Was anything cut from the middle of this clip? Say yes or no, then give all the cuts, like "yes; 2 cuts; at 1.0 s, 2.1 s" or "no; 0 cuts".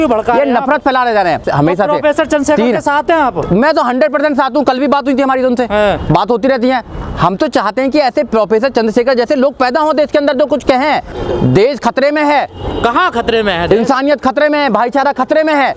yes; 2 cuts; at 1.5 s, 11.1 s